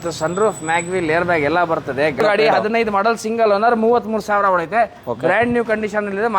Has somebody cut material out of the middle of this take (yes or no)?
yes